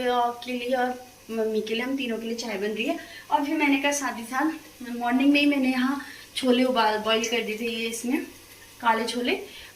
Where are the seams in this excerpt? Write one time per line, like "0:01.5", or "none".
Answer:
none